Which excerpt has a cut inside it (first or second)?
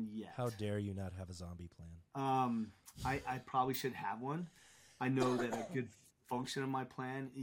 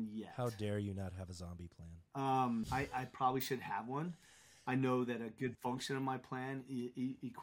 second